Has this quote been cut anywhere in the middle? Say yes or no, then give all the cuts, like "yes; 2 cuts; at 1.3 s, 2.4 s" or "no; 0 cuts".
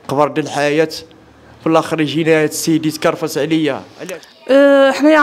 yes; 1 cut; at 3.9 s